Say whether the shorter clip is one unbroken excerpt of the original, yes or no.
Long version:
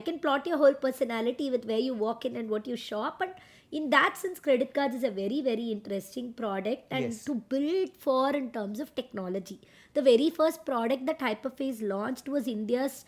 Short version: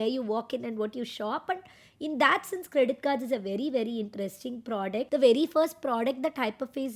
no